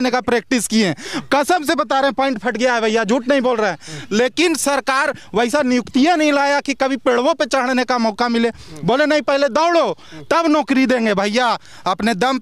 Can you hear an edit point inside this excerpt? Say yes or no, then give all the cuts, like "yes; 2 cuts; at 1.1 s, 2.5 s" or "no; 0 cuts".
no; 0 cuts